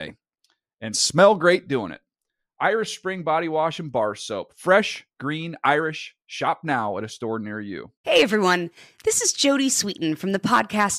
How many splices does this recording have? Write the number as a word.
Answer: one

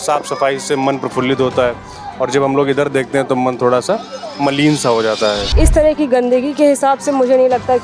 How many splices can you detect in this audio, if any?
one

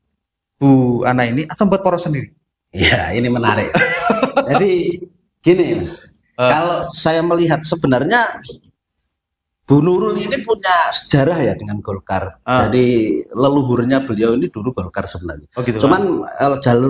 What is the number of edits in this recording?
zero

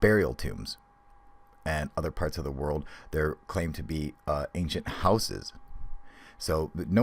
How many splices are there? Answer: one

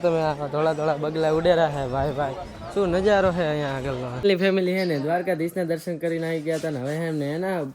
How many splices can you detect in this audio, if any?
one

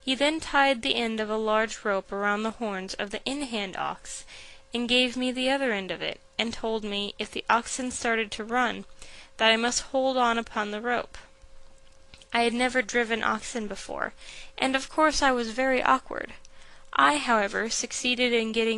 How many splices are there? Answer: one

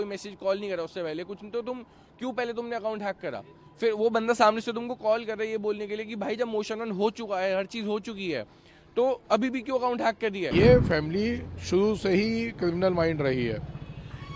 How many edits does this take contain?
one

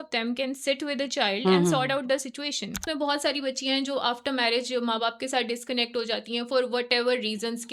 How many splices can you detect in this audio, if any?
one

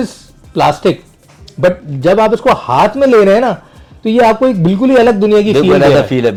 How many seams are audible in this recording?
zero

